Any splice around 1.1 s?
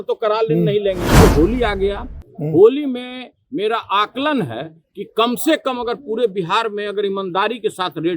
yes; 1 cut; at 1.1 s

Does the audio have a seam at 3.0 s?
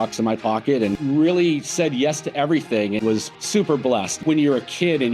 yes; 3 cuts; at 1.0 s, 3.0 s, 4.2 s

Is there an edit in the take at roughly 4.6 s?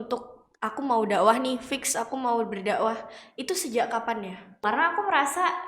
yes; 1 cut; at 4.6 s

